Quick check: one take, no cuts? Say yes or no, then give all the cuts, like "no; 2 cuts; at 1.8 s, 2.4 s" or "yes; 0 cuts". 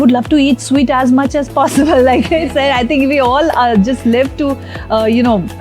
yes; 0 cuts